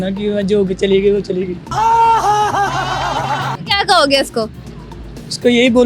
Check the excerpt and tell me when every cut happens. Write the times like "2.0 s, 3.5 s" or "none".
none